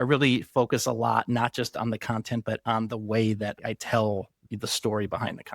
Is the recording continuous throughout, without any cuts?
no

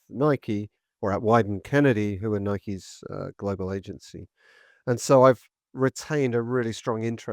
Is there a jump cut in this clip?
no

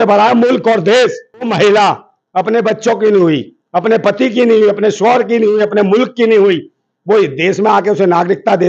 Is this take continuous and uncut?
no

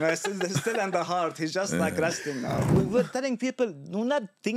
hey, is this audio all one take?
no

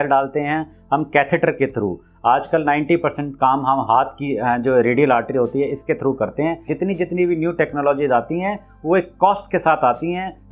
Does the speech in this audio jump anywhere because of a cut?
yes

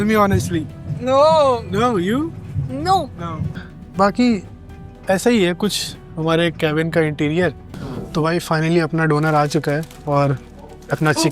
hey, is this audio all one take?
no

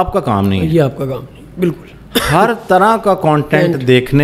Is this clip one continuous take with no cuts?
yes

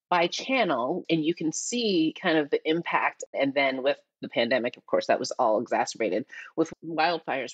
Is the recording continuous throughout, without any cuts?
no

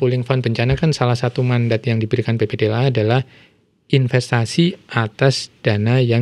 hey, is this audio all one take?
yes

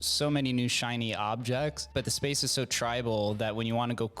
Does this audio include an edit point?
yes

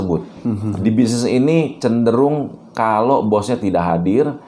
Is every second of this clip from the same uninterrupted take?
yes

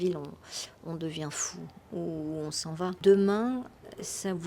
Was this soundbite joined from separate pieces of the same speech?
yes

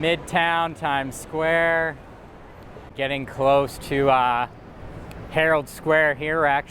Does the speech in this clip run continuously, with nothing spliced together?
no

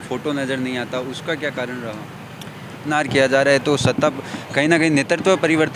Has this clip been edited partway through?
yes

